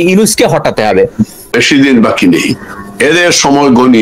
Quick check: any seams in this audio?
yes; 1 cut; at 1.6 s

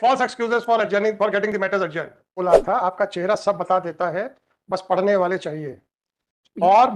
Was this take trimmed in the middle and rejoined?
yes; 1 cut; at 2.4 s

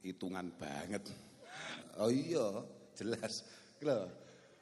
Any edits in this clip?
yes; 1 cut; at 1.8 s

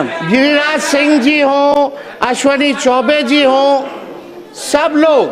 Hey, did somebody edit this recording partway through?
no; 0 cuts

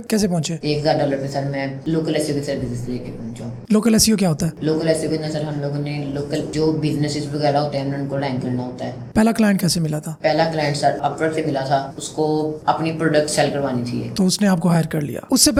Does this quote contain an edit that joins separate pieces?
no; 0 cuts

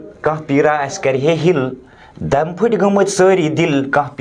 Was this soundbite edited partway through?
no; 0 cuts

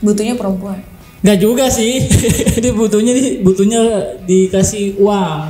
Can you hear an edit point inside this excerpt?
no; 0 cuts

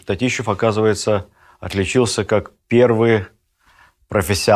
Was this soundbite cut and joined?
no; 0 cuts

